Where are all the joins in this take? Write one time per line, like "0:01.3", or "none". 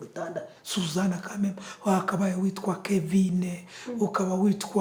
none